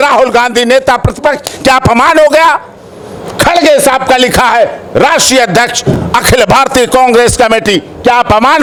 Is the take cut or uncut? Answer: uncut